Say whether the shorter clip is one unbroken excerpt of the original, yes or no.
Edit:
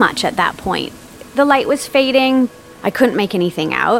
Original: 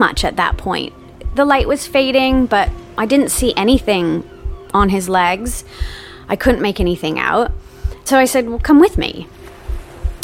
no